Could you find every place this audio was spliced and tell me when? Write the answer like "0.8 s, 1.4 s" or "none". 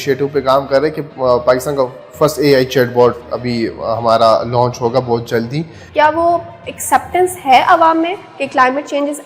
5.8 s